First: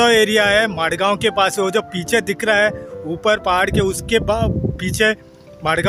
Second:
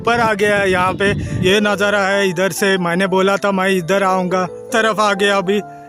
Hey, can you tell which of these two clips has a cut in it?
second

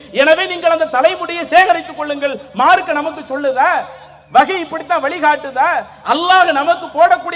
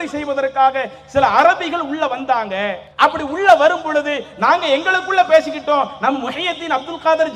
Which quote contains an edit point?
second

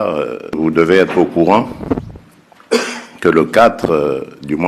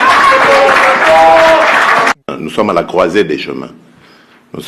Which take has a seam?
second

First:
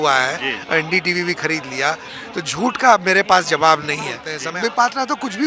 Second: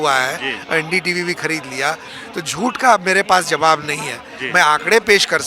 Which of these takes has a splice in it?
first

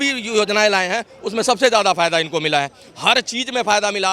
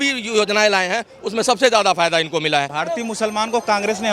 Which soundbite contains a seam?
second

